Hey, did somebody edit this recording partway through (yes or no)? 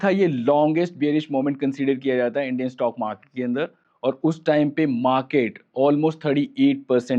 no